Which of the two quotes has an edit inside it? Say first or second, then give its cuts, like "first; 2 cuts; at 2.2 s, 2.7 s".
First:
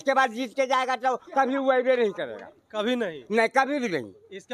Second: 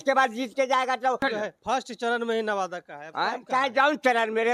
second; 1 cut; at 1.2 s